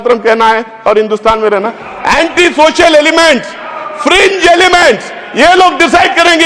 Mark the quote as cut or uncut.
uncut